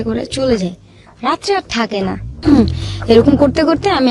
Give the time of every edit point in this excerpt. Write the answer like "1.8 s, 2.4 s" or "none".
2.3 s